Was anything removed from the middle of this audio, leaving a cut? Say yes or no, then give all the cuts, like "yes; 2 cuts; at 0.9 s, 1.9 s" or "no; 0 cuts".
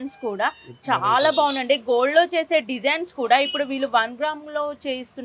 no; 0 cuts